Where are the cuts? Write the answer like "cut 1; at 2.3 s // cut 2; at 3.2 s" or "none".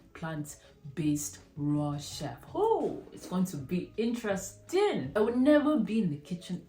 cut 1; at 5.1 s